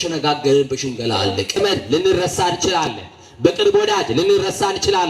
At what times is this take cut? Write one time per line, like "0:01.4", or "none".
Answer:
0:01.6